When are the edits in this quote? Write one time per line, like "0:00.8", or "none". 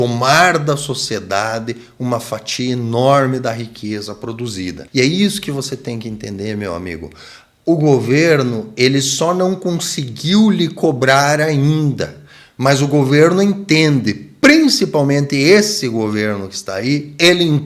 0:04.8